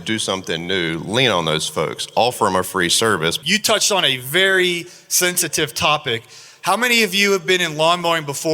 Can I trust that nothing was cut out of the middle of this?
no; 1 cut; at 3.4 s

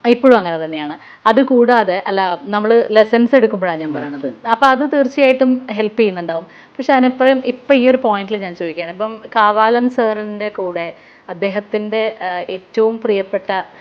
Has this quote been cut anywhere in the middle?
no; 0 cuts

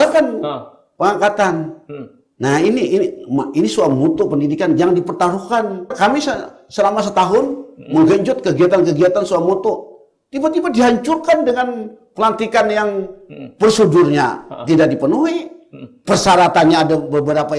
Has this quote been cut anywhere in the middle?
yes; 1 cut; at 5.9 s

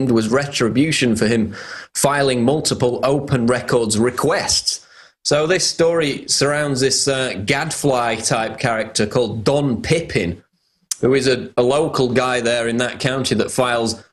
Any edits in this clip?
yes; 1 cut; at 4.6 s

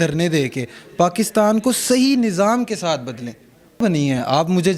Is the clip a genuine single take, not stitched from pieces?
no; 1 cut; at 3.8 s

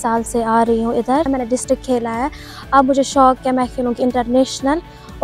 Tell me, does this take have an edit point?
yes; 1 cut; at 1.3 s

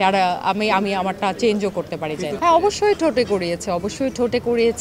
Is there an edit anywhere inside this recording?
yes; 1 cut; at 2.3 s

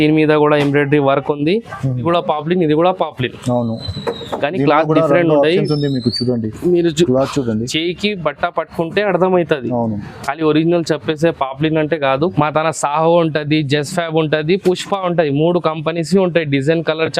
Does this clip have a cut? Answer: yes; 2 cuts; at 2.0 s, 12.3 s

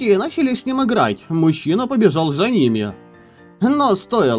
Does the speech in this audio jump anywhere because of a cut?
no; 0 cuts

